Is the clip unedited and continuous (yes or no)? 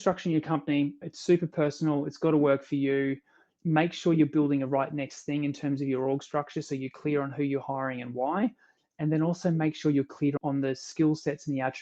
no